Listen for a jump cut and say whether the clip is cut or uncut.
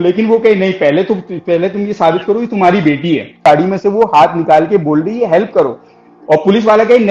cut